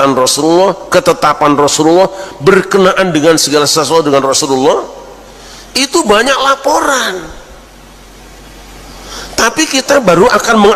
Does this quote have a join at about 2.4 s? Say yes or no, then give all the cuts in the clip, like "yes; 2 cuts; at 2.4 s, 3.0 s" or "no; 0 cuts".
no; 0 cuts